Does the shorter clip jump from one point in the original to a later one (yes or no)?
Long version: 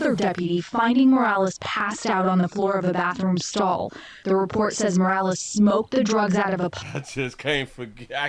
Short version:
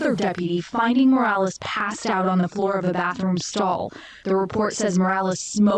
no